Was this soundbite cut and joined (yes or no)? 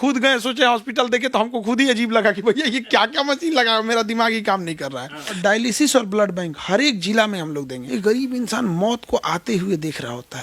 yes